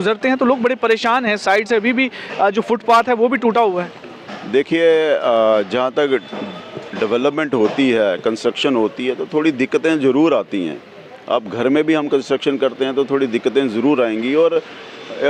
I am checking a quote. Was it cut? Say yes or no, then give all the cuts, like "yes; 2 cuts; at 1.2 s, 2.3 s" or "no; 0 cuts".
no; 0 cuts